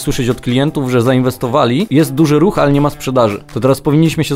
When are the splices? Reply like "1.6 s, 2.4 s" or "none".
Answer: 1.9 s, 3.5 s